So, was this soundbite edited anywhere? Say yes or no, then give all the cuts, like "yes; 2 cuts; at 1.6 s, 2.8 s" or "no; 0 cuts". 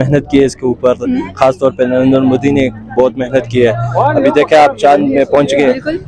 no; 0 cuts